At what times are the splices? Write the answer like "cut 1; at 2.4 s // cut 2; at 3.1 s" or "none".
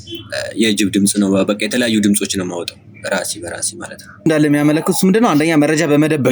cut 1; at 4.3 s